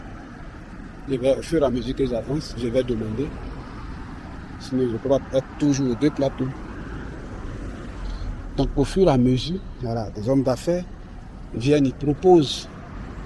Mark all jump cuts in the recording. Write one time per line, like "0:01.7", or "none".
none